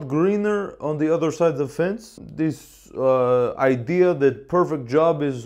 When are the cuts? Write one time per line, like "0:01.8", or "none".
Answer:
0:02.2